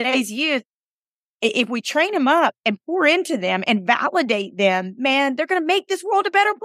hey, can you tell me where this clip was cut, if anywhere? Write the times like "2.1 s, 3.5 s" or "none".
none